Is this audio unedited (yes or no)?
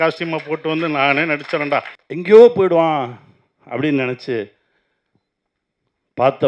no